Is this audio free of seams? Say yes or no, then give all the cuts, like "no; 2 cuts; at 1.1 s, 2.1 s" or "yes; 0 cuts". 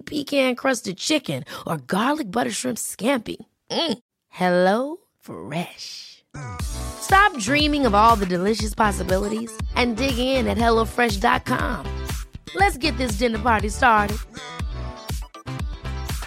yes; 0 cuts